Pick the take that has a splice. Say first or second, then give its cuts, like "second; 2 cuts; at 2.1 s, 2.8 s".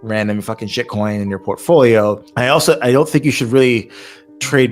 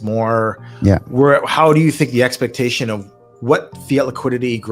first; 1 cut; at 2.3 s